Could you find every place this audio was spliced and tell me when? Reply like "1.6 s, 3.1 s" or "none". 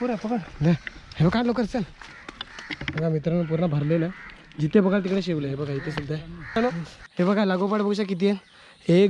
6.6 s